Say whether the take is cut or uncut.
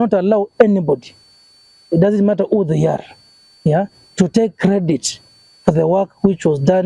uncut